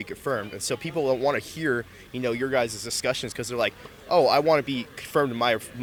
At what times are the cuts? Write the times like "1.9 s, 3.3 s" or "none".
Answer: none

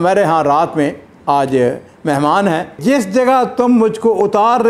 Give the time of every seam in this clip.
2.8 s

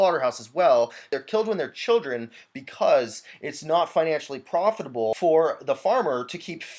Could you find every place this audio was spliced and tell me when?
1.2 s, 5.1 s

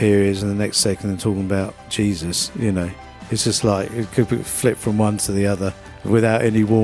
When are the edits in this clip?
5.9 s

